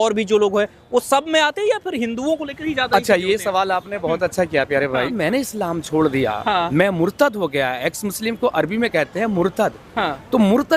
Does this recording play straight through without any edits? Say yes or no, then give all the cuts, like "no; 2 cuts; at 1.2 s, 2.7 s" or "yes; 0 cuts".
no; 2 cuts; at 5.1 s, 6.7 s